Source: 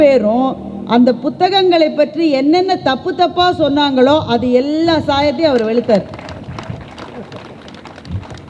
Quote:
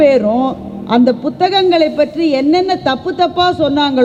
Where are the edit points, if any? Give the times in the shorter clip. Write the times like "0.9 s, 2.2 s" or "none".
none